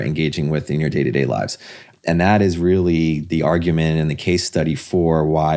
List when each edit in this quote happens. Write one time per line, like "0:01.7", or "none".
0:03.2